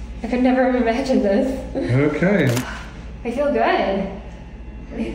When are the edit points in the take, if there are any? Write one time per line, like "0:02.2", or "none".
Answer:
0:02.6